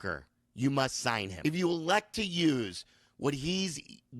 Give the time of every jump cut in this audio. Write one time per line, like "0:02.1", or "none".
0:01.3